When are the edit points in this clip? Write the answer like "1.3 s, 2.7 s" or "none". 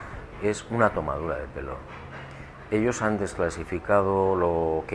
1.2 s